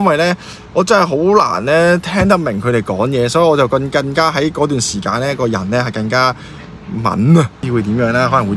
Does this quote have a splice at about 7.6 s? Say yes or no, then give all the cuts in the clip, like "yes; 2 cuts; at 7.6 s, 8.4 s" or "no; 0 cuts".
yes; 1 cut; at 7.6 s